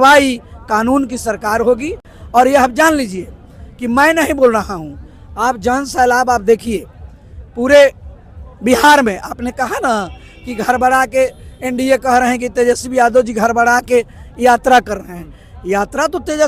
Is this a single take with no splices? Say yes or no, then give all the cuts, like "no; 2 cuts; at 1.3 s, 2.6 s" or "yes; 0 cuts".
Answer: yes; 0 cuts